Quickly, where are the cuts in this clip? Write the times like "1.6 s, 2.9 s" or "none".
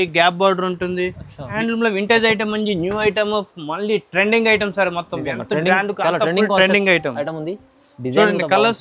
1.6 s